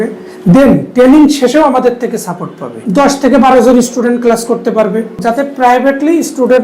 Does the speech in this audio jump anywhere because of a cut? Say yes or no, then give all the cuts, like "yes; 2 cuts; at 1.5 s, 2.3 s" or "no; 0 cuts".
yes; 2 cuts; at 2.8 s, 5.2 s